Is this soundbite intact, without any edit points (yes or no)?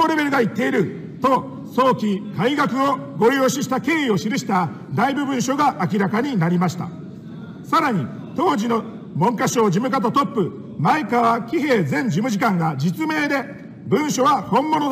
yes